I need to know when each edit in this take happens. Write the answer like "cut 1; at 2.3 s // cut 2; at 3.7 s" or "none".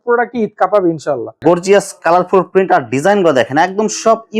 cut 1; at 1.3 s